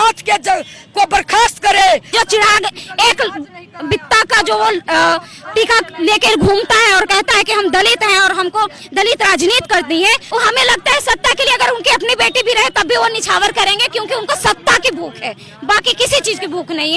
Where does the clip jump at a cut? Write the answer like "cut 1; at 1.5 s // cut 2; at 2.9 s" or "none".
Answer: cut 1; at 2.1 s // cut 2; at 10.2 s